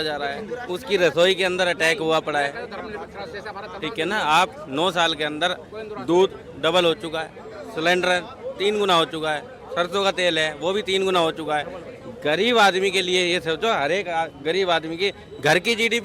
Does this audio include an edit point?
no; 0 cuts

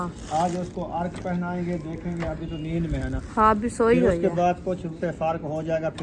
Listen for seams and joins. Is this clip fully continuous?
no; 1 cut; at 4.9 s

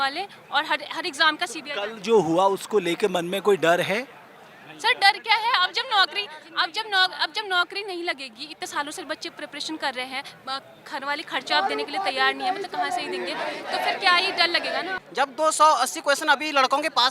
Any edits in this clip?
yes; 1 cut; at 15.0 s

